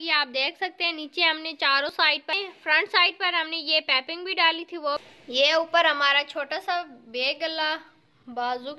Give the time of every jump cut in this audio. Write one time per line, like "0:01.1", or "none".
0:02.0
0:05.1